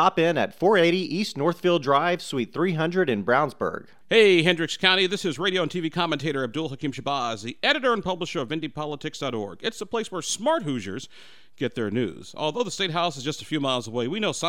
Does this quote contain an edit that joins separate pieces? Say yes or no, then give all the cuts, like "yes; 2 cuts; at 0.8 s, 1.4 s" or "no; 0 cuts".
yes; 1 cut; at 3.9 s